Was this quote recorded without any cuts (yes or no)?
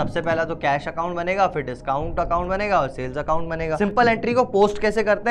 no